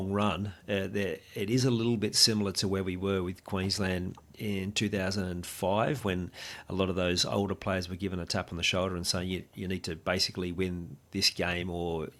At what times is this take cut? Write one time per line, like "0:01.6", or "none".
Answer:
none